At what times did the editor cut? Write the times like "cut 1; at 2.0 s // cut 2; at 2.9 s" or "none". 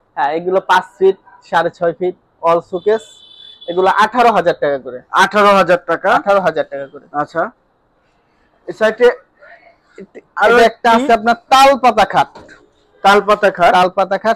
none